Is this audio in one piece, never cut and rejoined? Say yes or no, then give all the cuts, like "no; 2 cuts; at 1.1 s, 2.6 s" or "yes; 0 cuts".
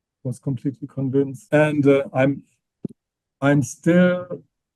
no; 1 cut; at 1.4 s